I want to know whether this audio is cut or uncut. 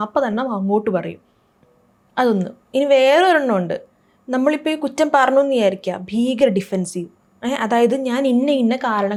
uncut